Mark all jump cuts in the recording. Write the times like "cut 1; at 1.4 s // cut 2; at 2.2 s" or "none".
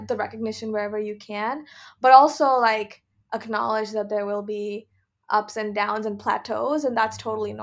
none